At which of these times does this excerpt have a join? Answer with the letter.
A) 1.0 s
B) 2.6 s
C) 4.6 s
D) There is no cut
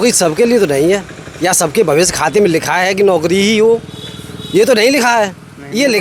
D